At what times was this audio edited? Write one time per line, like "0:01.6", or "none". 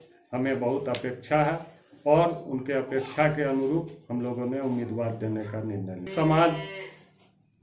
0:06.1